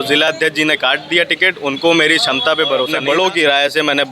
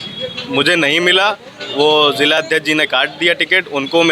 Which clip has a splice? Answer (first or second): first